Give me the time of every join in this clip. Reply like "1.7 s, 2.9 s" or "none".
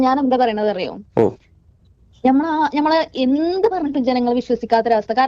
none